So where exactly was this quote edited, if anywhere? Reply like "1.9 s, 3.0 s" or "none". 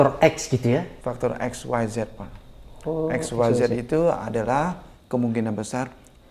0.9 s